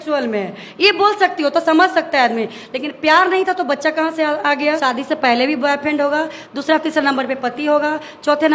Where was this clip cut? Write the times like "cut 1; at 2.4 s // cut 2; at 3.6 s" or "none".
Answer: cut 1; at 4.8 s